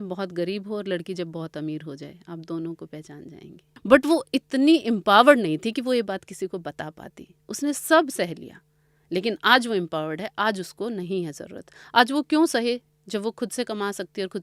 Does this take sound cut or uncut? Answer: cut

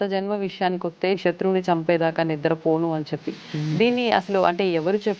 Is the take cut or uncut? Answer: cut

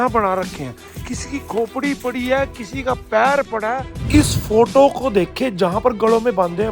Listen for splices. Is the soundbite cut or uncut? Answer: cut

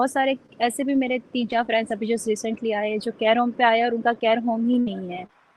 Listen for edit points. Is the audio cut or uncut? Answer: uncut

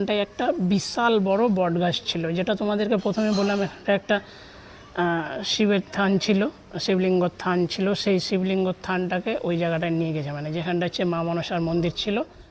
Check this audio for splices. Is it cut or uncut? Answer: uncut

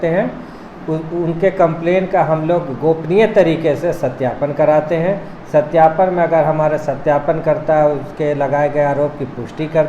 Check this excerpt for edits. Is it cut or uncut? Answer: uncut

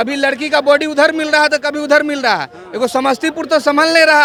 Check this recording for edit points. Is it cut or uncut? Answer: uncut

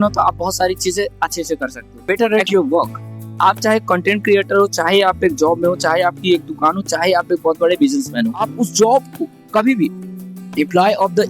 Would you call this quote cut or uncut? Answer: cut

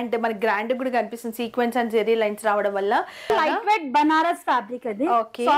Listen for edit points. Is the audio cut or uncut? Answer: cut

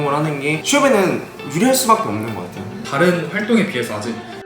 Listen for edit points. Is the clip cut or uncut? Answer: cut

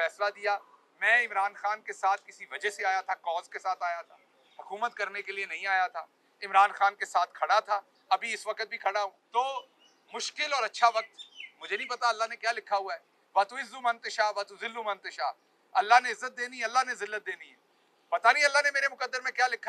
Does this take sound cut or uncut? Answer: cut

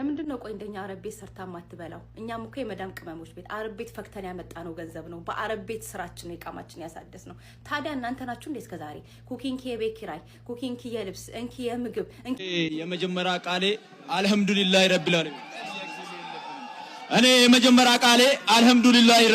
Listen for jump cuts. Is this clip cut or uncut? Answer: cut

